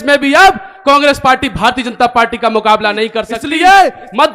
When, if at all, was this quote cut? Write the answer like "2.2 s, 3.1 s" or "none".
3.4 s